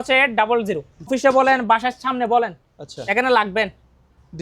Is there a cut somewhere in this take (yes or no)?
yes